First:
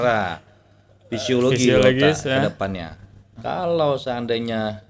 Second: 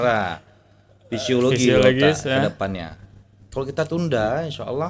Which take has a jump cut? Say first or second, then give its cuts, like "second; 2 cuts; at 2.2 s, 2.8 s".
first; 1 cut; at 3.3 s